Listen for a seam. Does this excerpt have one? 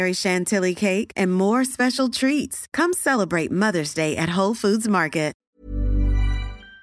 yes; 1 cut; at 5.5 s

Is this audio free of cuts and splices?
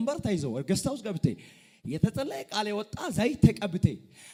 yes; 0 cuts

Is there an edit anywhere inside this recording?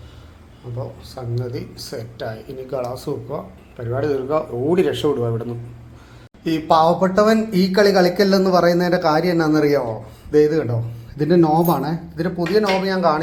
no; 0 cuts

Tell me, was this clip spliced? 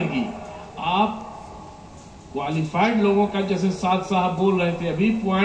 no; 0 cuts

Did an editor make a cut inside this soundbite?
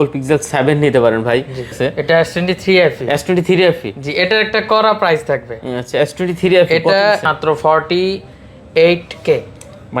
yes; 2 cuts; at 1.8 s, 7.3 s

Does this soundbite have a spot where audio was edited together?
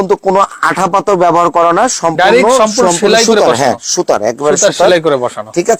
no; 0 cuts

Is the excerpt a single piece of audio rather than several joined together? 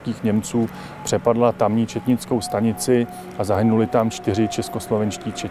yes; 0 cuts

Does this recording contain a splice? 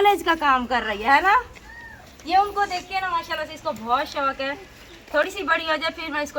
no; 0 cuts

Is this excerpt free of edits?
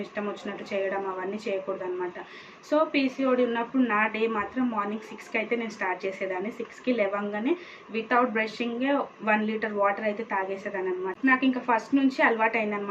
yes; 0 cuts

